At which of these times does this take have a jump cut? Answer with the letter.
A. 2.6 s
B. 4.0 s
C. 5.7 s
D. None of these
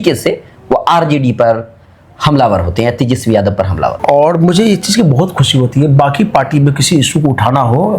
B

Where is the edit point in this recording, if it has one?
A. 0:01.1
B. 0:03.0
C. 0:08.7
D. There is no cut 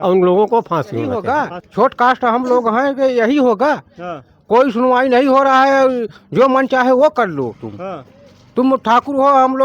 A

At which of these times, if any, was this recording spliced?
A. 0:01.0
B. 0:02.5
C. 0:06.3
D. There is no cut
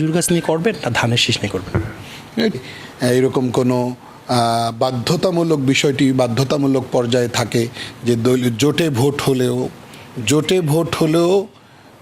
B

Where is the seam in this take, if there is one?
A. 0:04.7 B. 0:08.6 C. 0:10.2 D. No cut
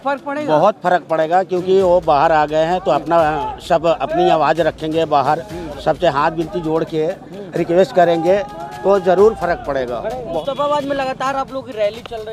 C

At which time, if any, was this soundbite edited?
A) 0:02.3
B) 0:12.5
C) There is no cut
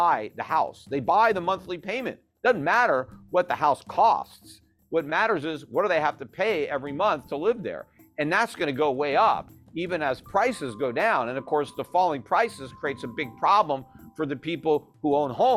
C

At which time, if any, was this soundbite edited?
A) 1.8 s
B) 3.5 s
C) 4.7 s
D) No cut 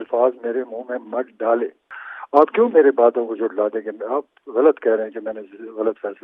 A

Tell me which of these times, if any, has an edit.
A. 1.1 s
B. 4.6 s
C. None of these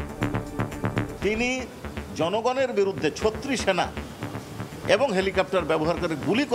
A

